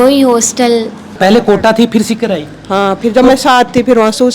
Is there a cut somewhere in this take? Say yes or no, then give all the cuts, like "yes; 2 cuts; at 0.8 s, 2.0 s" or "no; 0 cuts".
yes; 1 cut; at 1.1 s